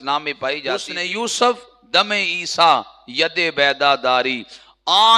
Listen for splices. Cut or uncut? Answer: cut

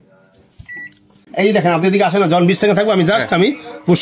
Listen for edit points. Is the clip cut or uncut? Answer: cut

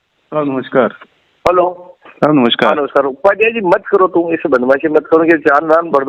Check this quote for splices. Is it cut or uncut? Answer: uncut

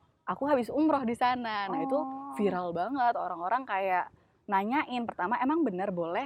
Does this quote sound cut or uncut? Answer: uncut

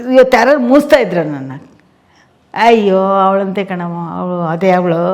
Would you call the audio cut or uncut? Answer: uncut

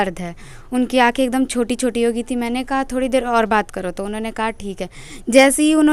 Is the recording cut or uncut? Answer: uncut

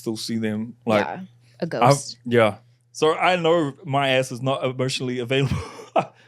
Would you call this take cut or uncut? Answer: cut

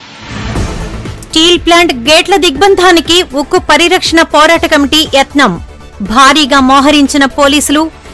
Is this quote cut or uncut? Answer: cut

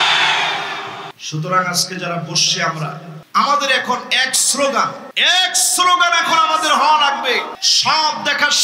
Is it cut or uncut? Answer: cut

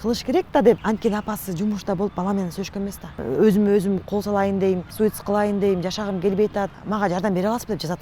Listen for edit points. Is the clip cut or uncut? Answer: cut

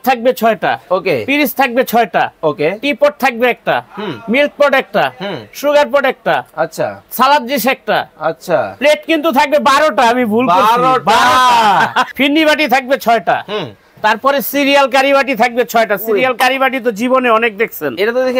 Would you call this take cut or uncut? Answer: cut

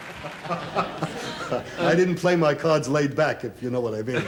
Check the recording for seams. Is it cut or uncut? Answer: uncut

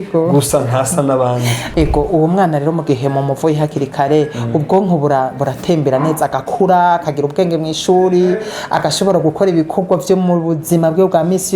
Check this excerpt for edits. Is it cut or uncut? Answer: cut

